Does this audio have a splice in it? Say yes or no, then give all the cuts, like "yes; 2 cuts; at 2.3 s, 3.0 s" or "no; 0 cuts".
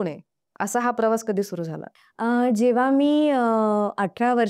no; 0 cuts